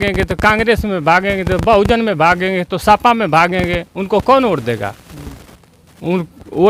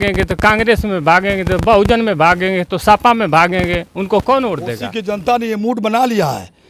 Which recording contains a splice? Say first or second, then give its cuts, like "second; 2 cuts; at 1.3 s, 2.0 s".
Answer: second; 1 cut; at 4.9 s